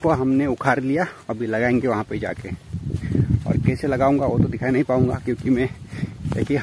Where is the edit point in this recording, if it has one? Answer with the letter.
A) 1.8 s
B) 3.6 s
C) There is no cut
C